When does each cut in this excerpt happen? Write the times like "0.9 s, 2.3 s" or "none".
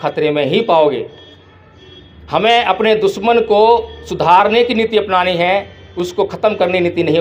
none